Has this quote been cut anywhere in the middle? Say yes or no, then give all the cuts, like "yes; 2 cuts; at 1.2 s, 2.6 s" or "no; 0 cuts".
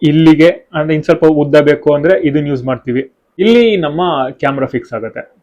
yes; 1 cut; at 3.2 s